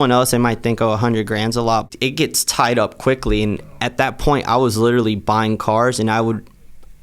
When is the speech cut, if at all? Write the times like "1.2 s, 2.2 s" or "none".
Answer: 1.8 s